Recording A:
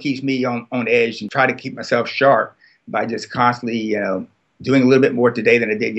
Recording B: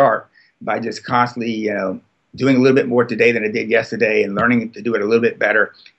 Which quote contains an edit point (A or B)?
A